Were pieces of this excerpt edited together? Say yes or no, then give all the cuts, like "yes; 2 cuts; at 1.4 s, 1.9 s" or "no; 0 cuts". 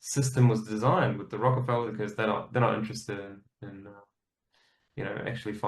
yes; 1 cut; at 1.9 s